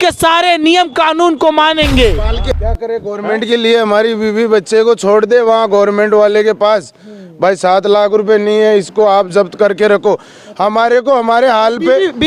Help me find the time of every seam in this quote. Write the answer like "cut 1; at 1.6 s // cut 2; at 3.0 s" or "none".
cut 1; at 2.5 s